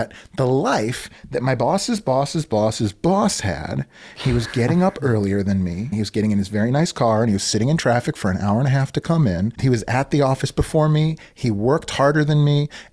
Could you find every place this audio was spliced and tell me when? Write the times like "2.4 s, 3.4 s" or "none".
5.9 s

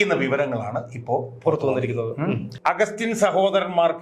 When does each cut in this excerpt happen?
2.5 s

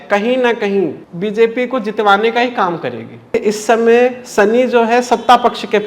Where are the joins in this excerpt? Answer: 1.1 s, 3.3 s

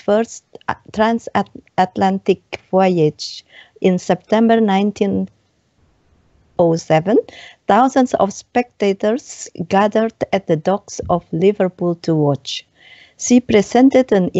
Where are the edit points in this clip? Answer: 6.8 s

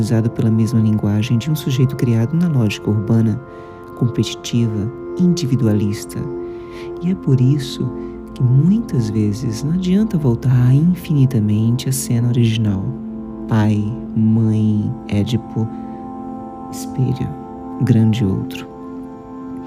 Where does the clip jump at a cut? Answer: 18.5 s

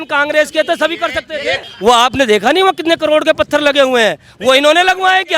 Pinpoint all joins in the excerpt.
1.6 s

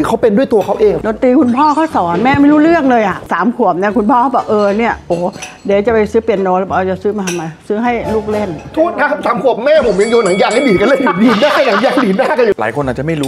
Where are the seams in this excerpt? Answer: 1.0 s, 12.5 s

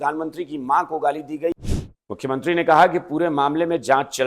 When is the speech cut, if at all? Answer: 1.7 s

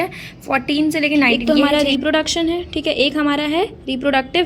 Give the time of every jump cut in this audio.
1.4 s

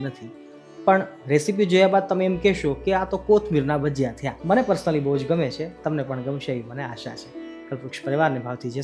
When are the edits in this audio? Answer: 4.2 s

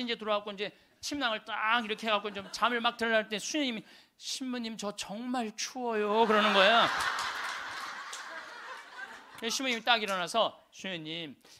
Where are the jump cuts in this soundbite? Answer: 9.2 s

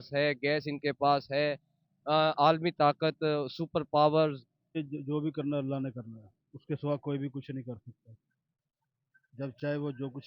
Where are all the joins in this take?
4.8 s

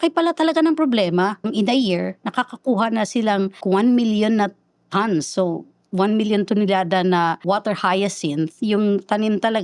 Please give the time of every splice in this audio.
1.5 s, 3.6 s, 7.4 s

